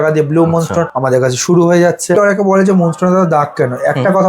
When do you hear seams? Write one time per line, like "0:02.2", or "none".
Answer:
0:00.9
0:02.2